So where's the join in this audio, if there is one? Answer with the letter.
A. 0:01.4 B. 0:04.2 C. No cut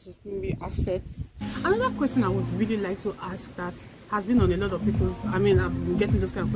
A